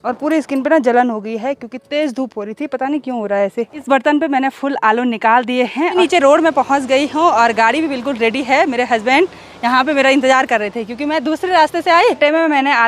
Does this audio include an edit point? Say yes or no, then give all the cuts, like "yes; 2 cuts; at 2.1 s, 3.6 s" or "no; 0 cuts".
yes; 3 cuts; at 3.8 s, 6.0 s, 12.2 s